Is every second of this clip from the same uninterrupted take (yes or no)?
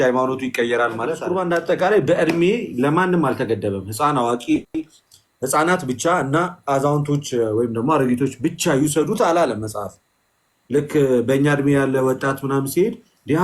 no